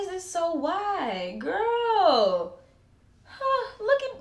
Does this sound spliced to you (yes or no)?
no